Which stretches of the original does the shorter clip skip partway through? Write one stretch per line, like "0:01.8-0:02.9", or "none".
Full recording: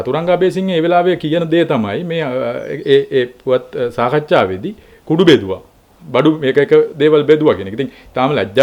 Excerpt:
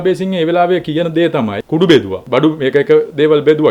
0:02.0-0:05.0
0:05.5-0:06.0